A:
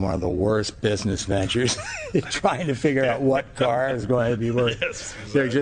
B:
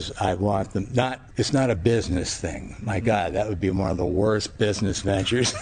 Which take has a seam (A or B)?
B